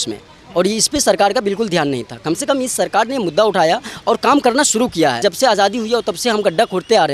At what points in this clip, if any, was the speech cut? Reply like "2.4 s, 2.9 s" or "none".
5.2 s